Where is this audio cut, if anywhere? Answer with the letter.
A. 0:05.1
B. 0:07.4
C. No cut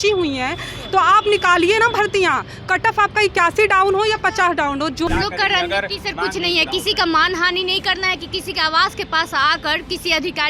A